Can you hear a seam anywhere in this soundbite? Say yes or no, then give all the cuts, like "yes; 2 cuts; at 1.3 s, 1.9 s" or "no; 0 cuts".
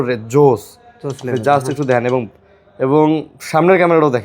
no; 0 cuts